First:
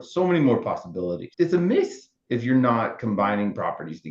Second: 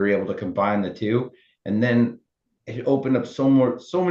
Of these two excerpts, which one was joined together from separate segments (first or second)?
first